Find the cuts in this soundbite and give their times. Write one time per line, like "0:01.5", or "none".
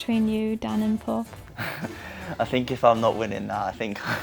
none